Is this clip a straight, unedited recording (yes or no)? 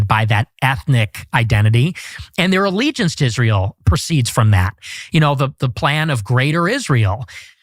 yes